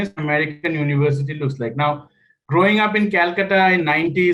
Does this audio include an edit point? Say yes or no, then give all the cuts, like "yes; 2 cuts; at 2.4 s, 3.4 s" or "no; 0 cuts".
no; 0 cuts